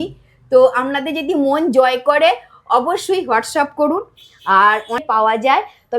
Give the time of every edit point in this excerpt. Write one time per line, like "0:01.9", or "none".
0:05.0